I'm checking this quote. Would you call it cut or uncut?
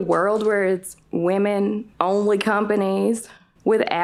uncut